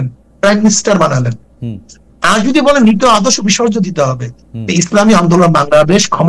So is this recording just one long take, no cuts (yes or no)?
yes